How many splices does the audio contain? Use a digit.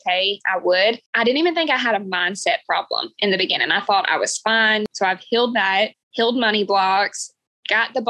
2